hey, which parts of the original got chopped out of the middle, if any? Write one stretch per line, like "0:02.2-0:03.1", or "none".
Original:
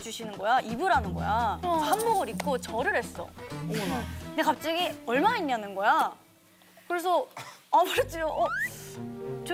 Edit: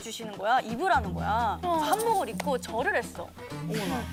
none